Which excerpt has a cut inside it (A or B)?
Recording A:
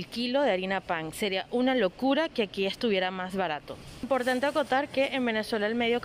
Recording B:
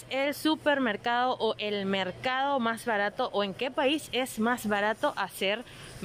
A